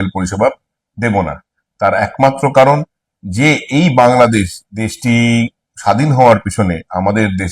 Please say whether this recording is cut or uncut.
uncut